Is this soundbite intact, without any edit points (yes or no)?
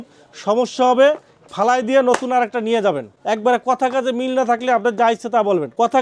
yes